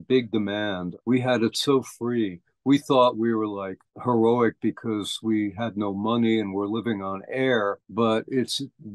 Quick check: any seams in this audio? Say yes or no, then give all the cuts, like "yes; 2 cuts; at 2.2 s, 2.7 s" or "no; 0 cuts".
no; 0 cuts